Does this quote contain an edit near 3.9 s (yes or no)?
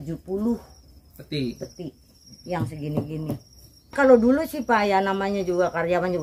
yes